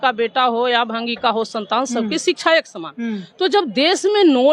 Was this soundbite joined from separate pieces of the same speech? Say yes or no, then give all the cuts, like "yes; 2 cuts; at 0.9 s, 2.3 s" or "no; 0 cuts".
no; 0 cuts